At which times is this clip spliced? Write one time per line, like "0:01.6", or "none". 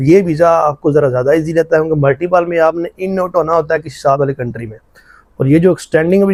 none